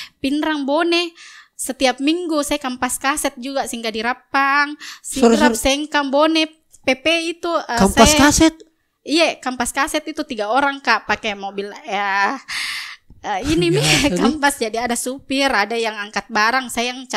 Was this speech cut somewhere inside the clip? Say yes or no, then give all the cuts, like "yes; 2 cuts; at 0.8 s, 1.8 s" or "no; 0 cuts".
no; 0 cuts